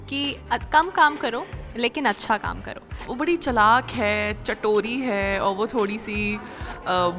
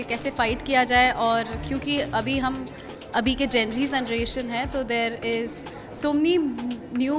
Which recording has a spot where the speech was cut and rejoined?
first; 1 cut; at 3.1 s

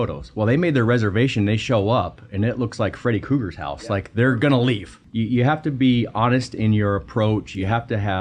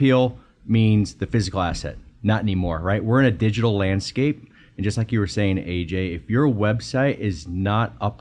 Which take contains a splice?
first; 1 cut; at 5.0 s

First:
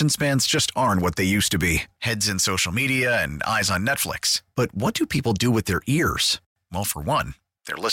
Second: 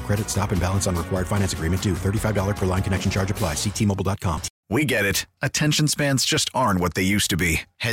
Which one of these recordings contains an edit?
second; 1 cut; at 4.5 s

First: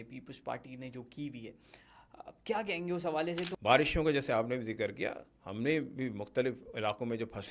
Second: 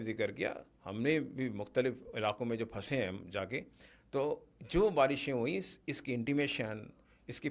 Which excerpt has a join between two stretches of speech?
first; 1 cut; at 3.5 s

